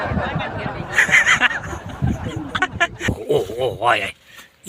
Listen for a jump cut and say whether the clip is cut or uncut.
cut